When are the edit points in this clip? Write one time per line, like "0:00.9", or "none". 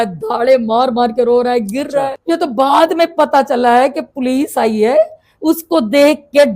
0:02.2